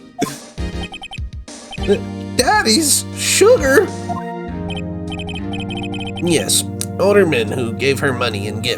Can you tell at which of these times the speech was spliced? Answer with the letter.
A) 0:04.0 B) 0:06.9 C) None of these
C